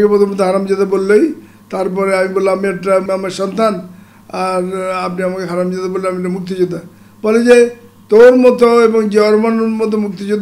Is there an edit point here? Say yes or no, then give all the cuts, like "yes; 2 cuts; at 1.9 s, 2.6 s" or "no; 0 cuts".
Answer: yes; 1 cut; at 3.0 s